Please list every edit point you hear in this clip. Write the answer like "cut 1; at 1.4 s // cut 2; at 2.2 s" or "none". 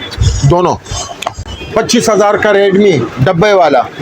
cut 1; at 1.5 s